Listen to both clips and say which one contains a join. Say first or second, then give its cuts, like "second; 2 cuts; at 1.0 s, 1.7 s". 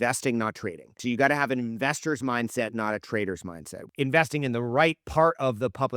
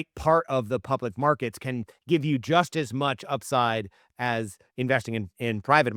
first; 2 cuts; at 1.0 s, 3.8 s